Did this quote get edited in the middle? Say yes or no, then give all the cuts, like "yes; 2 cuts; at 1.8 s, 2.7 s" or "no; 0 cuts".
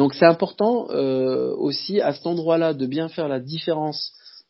no; 0 cuts